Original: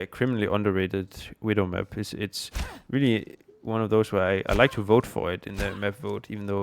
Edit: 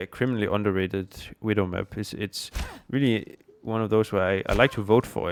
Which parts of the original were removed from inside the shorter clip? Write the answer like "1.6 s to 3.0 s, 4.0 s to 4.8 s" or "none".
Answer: none